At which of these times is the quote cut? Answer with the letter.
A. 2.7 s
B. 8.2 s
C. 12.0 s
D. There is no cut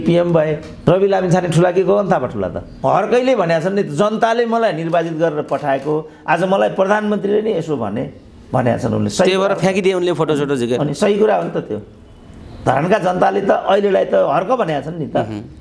A